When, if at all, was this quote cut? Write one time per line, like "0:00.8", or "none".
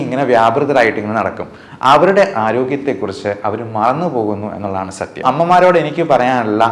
0:05.2

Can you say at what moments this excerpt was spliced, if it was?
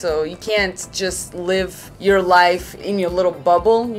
0:01.8

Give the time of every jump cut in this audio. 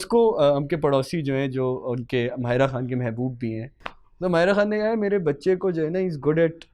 0:03.7

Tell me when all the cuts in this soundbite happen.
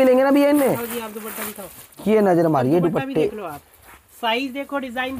none

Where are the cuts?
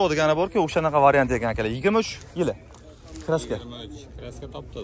none

